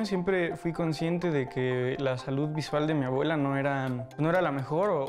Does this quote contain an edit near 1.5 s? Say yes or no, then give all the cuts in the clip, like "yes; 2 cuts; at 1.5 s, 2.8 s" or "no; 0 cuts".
no; 1 cut; at 4.0 s